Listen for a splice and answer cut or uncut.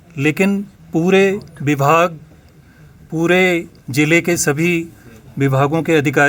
uncut